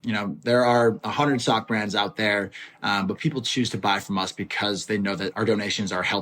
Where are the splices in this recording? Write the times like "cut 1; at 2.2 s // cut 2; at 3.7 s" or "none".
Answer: cut 1; at 5.3 s